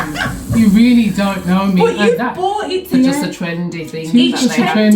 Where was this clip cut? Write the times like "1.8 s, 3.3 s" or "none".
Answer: 2.9 s